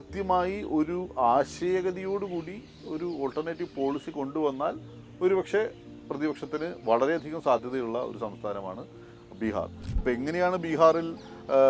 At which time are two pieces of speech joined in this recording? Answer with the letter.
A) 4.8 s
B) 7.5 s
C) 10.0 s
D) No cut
C